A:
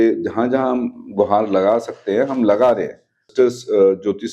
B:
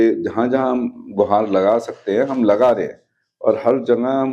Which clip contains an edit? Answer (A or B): A